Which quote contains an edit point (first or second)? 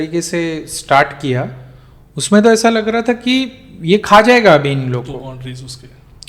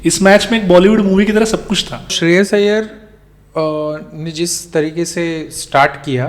second